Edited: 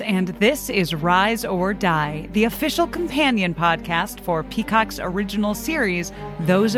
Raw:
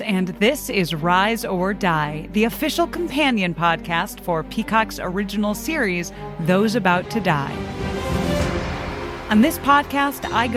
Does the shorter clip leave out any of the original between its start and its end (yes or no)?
no